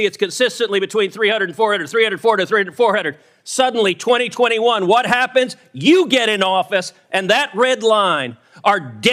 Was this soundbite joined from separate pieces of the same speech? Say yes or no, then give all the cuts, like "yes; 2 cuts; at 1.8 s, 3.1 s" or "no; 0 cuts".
no; 0 cuts